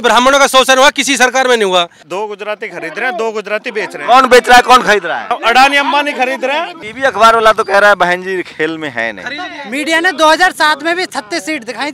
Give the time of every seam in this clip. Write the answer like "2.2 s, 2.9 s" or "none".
2.0 s, 5.3 s, 6.8 s, 9.6 s